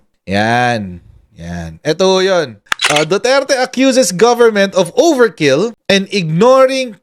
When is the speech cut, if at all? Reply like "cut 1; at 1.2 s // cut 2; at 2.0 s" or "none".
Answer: cut 1; at 2.6 s // cut 2; at 5.8 s